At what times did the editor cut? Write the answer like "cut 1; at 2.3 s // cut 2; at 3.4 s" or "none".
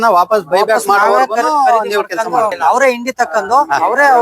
cut 1; at 2.6 s